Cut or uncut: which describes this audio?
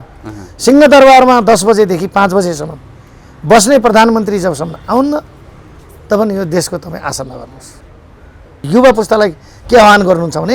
cut